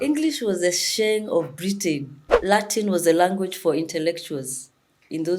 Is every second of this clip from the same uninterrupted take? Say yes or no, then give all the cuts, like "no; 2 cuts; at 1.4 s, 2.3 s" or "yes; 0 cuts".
no; 1 cut; at 2.3 s